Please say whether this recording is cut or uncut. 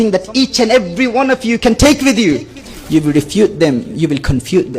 cut